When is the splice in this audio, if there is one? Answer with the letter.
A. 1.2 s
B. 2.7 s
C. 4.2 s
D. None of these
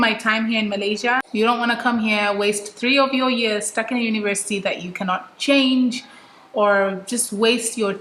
A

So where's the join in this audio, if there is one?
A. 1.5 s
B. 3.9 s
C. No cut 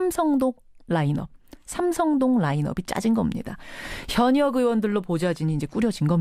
C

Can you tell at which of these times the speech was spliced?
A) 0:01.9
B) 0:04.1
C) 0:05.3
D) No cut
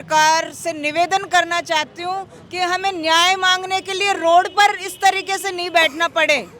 D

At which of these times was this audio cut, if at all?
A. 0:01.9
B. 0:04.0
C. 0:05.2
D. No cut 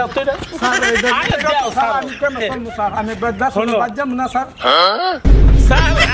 C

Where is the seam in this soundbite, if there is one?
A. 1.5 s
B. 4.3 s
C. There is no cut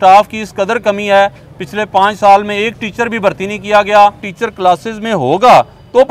B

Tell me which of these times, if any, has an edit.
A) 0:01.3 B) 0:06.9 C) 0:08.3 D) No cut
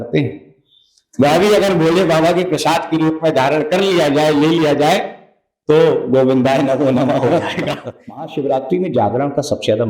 C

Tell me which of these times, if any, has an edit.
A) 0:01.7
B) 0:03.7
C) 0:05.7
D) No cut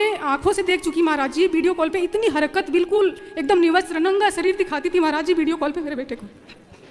D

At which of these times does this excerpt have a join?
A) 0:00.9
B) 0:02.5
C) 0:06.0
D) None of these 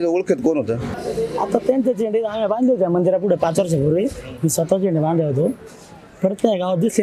A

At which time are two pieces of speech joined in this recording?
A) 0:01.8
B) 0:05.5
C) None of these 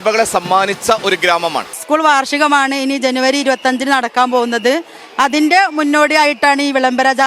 A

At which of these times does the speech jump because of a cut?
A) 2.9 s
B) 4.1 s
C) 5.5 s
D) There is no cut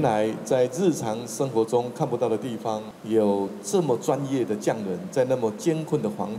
A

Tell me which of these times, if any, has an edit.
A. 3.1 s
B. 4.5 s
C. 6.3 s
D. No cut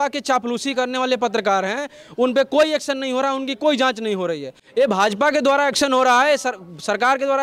B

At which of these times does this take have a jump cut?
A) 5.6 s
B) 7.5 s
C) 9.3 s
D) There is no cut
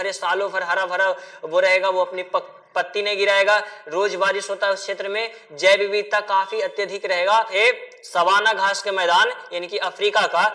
B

